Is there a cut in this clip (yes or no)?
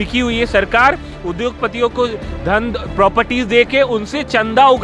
no